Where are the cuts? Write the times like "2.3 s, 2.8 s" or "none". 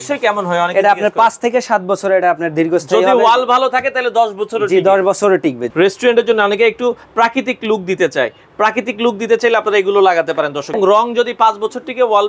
5.6 s, 10.8 s